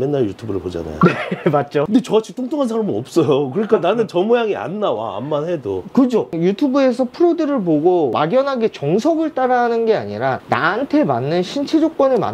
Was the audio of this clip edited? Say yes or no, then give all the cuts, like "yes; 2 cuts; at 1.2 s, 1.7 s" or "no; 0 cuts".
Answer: no; 0 cuts